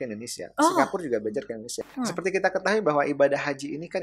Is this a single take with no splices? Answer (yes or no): no